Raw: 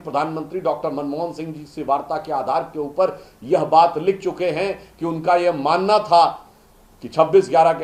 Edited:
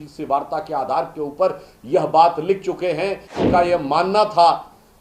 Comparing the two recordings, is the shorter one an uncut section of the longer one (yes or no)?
no